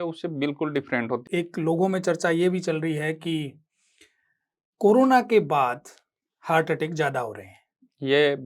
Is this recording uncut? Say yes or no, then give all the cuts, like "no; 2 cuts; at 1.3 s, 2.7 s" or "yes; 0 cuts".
no; 1 cut; at 1.2 s